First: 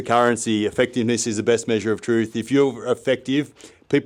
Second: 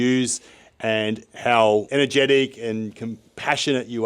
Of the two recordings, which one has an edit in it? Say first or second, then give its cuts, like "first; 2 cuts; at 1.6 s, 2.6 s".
second; 1 cut; at 1.9 s